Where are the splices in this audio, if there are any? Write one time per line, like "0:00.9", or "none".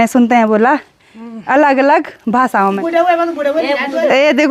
0:02.8